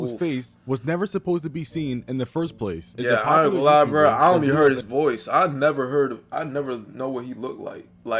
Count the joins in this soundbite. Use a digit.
1